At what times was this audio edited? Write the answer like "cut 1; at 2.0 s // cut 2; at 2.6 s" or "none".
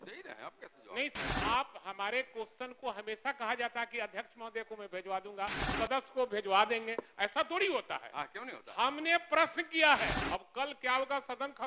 cut 1; at 1.3 s // cut 2; at 5.7 s // cut 3; at 10.2 s